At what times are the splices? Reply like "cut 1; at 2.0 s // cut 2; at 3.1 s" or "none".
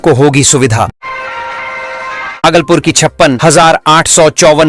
cut 1; at 1.0 s // cut 2; at 2.4 s